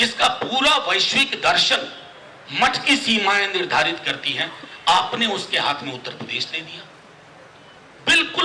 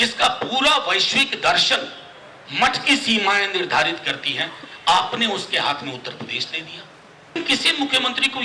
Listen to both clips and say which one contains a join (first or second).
second